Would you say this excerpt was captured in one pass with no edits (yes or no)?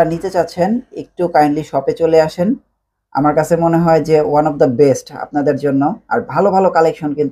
yes